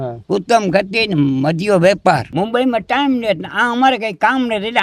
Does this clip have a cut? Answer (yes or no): yes